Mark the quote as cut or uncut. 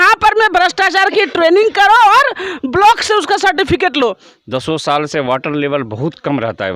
cut